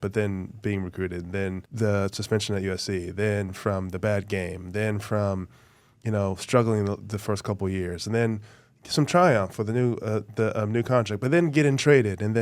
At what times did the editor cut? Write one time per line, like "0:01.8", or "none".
0:01.6